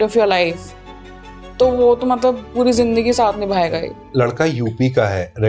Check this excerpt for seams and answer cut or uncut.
cut